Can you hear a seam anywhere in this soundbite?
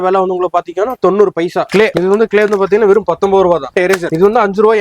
yes; 2 cuts; at 1.9 s, 3.7 s

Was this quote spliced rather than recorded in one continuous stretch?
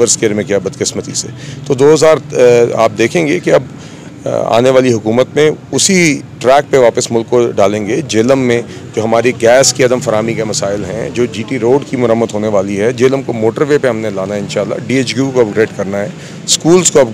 no; 0 cuts

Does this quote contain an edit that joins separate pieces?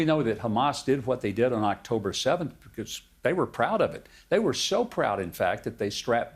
no; 0 cuts

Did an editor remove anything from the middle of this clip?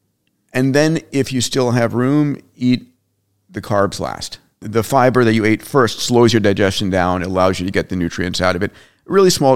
yes; 1 cut; at 4.6 s

